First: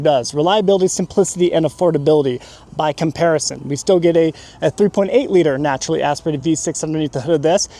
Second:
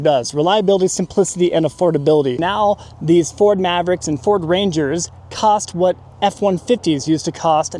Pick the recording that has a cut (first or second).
second